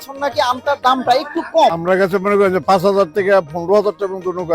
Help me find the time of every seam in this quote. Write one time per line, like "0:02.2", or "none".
0:01.8